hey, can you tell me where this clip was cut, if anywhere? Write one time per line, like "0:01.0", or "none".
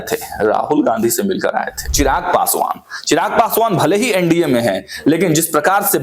0:01.8